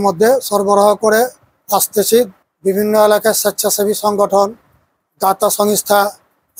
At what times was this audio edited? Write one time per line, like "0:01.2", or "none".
0:02.4